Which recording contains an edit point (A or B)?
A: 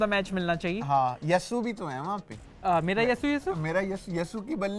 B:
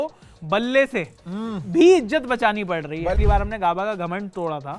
B